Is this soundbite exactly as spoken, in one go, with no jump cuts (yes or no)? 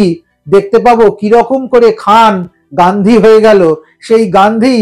yes